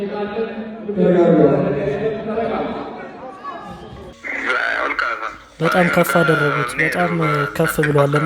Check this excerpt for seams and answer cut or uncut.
cut